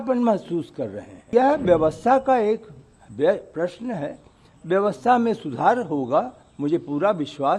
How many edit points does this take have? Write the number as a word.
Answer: one